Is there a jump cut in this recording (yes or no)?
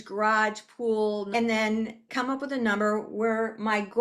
yes